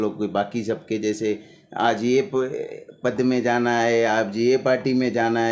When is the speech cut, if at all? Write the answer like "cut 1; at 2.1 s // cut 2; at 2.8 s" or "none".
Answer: none